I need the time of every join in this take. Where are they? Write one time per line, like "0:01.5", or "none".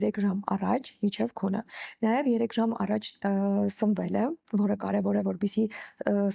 none